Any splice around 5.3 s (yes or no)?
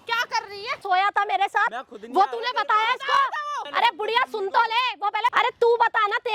yes